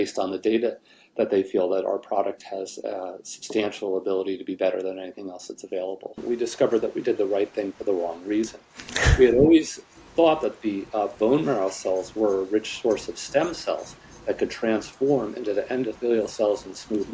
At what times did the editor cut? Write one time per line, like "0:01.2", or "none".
0:06.2